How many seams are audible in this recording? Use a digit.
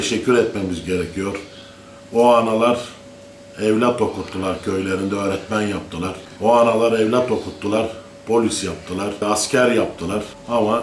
0